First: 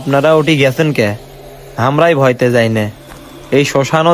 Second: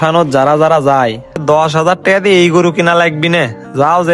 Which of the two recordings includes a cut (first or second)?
second